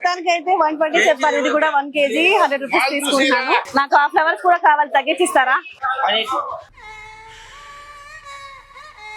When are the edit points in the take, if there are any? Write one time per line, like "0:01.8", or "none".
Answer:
0:03.7